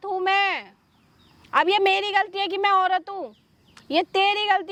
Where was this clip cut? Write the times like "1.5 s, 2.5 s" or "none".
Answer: none